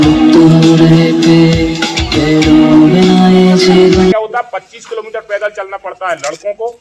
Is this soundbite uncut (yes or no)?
no